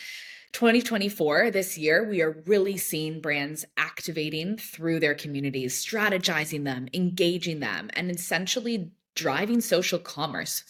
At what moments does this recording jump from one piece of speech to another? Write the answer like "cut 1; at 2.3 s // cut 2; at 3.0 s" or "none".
none